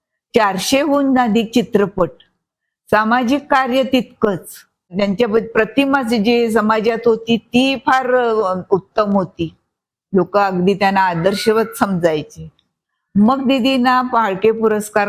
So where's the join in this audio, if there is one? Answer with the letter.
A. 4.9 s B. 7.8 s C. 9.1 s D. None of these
A